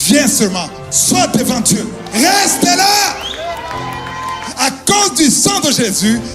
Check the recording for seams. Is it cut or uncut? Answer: cut